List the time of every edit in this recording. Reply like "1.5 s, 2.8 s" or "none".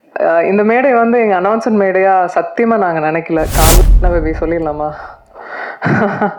3.8 s